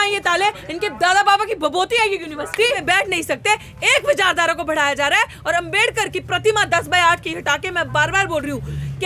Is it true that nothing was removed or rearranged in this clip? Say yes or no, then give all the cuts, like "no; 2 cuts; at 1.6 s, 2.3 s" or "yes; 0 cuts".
no; 1 cut; at 2.8 s